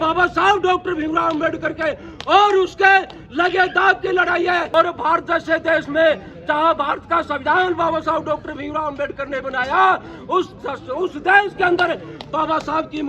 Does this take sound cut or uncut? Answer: cut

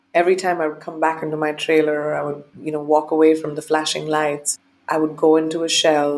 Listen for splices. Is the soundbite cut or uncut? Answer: cut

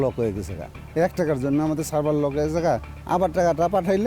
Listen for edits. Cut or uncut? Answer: cut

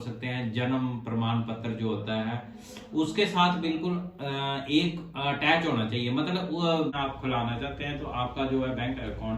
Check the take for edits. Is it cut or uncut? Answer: cut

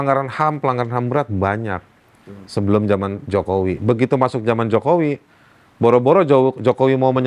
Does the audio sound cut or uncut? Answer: uncut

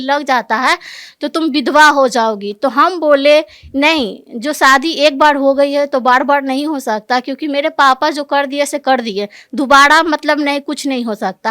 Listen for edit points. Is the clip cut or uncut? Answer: uncut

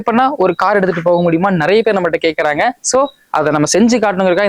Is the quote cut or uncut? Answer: uncut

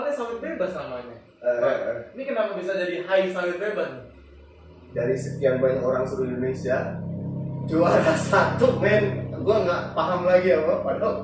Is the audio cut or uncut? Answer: cut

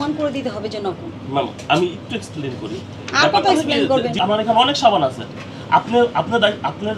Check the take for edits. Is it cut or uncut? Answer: cut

